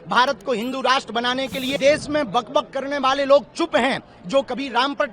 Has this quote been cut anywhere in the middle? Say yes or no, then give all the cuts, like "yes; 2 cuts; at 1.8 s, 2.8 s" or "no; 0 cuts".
yes; 1 cut; at 1.7 s